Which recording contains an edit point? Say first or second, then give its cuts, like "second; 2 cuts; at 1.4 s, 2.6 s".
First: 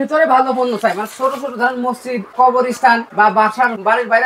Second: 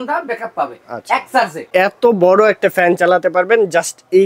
second; 1 cut; at 1.7 s